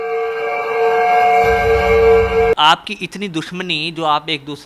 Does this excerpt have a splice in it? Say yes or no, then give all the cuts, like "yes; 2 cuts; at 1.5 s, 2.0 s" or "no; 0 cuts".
yes; 1 cut; at 2.6 s